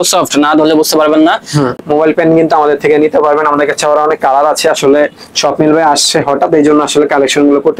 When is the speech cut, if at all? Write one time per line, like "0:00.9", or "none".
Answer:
0:01.7